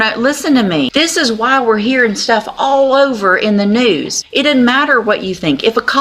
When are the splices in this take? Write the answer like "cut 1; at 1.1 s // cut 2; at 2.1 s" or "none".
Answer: cut 1; at 0.9 s // cut 2; at 4.2 s